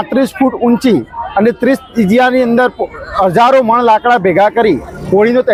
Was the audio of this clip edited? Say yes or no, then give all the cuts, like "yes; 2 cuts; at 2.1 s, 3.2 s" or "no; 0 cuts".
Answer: no; 0 cuts